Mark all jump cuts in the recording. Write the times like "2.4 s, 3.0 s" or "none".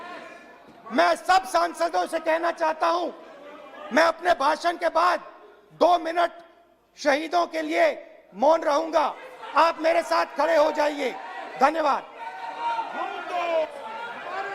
none